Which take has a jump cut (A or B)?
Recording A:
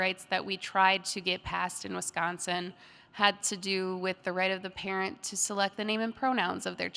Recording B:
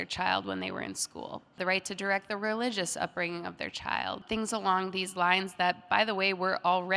B